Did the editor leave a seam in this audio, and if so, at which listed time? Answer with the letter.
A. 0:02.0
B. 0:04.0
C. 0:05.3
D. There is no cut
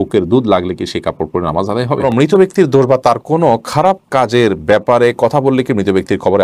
A